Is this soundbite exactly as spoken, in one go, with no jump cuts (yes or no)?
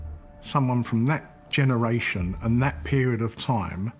yes